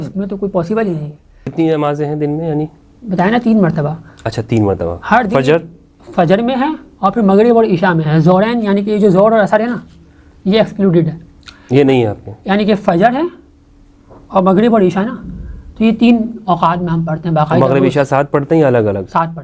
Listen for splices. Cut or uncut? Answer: cut